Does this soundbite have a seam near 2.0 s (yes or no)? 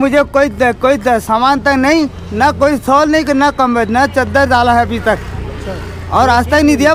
no